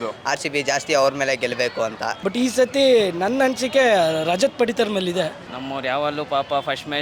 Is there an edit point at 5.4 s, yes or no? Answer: yes